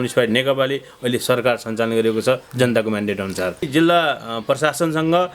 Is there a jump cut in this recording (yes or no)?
yes